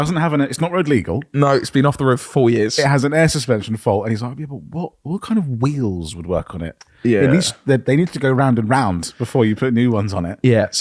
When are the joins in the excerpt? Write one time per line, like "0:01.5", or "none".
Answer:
none